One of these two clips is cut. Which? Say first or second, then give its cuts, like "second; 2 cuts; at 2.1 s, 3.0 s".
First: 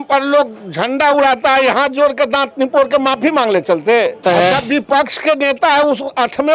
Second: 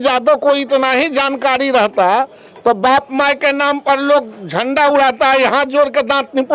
first; 1 cut; at 4.2 s